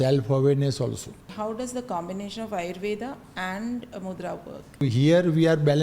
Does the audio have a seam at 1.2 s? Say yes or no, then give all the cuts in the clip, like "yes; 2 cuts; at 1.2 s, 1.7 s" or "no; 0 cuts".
yes; 2 cuts; at 1.2 s, 4.8 s